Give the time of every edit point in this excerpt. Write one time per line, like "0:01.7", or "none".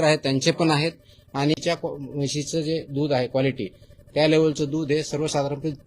0:01.5